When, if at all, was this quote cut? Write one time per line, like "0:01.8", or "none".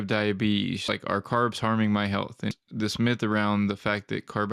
0:00.8
0:02.5